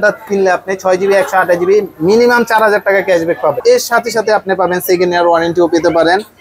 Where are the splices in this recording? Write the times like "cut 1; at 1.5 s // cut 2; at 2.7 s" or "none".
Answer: cut 1; at 3.6 s